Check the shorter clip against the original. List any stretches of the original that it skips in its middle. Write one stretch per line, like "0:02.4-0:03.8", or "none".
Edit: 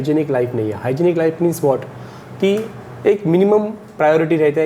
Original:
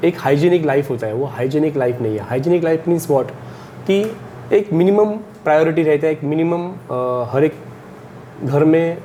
none